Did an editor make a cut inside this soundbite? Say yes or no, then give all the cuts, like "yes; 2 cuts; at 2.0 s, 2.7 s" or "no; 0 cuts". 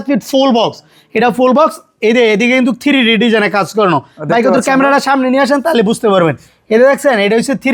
no; 0 cuts